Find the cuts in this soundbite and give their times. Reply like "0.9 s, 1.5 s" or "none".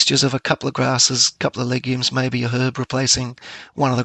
none